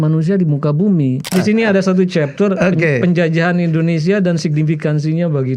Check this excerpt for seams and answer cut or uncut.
cut